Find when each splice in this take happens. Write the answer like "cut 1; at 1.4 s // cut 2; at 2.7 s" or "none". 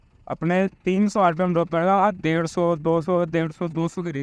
none

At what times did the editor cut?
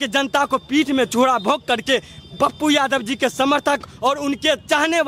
none

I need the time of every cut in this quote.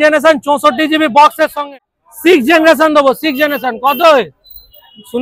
cut 1; at 1.6 s

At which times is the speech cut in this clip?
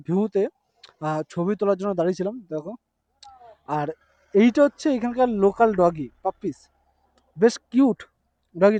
none

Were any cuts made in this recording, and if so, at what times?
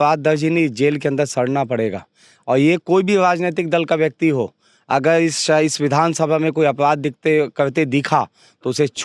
none

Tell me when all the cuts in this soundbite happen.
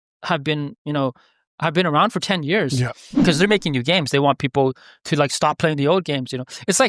cut 1; at 3.1 s

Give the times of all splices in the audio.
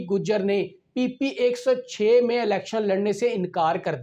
none

